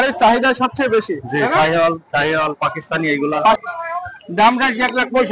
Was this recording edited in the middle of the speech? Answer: yes; 1 cut; at 3.6 s

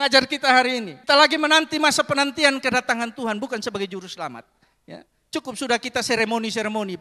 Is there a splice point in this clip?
yes; 1 cut; at 0.9 s

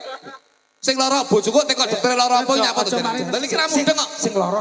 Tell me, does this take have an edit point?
yes; 1 cut; at 3.2 s

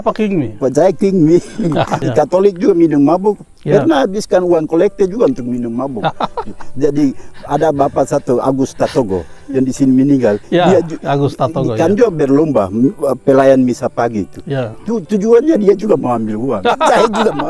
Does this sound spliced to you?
yes; 1 cut; at 2.0 s

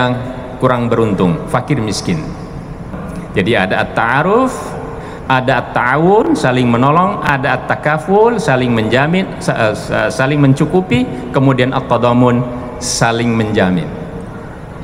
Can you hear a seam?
yes; 1 cut; at 3.0 s

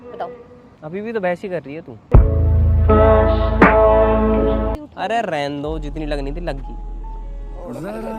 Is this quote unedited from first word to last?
no; 1 cut; at 4.8 s

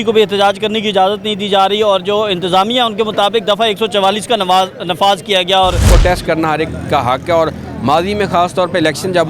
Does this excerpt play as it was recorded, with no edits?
no; 1 cut; at 5.8 s

